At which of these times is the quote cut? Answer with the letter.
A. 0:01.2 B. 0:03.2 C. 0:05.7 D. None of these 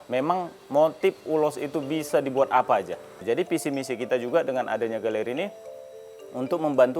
B